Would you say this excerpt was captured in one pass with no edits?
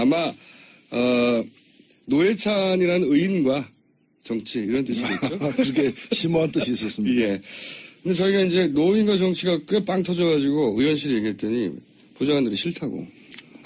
no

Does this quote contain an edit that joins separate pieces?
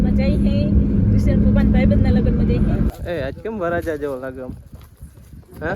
yes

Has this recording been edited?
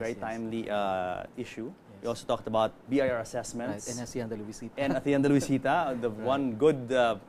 yes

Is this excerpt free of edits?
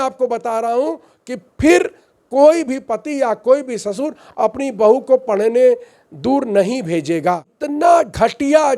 no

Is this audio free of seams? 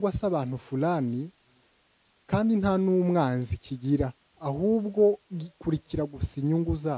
yes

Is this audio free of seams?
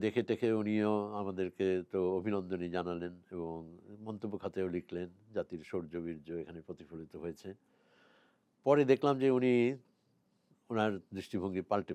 yes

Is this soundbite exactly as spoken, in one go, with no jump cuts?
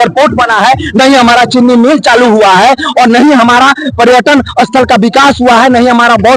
yes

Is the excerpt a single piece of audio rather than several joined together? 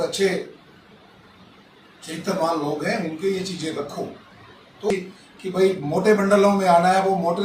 no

